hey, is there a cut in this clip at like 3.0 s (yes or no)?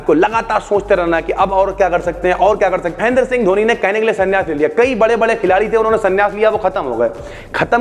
yes